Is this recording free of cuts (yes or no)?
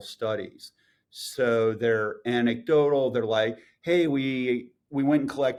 yes